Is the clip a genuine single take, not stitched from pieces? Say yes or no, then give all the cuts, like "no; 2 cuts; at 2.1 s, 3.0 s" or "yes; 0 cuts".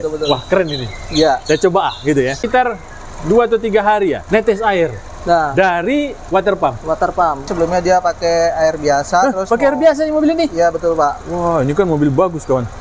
no; 4 cuts; at 2.4 s, 4.2 s, 6.2 s, 7.5 s